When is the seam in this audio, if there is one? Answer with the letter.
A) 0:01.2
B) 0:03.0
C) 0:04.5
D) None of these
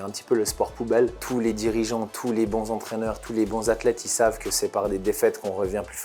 A